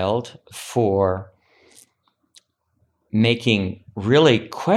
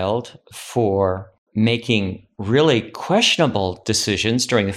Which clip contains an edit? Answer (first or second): second